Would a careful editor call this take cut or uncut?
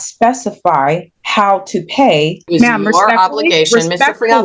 cut